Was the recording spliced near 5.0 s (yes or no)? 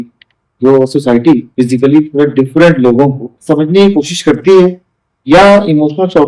no